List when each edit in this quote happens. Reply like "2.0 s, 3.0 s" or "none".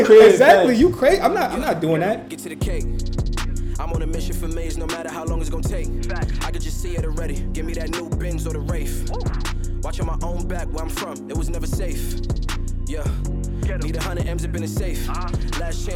2.2 s